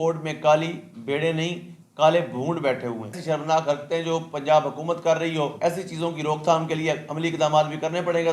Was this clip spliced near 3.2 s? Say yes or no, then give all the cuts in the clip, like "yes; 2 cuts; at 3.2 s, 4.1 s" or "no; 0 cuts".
yes; 2 cuts; at 3.2 s, 5.5 s